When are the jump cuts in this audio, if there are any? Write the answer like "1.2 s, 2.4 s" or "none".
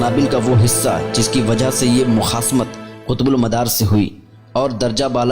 none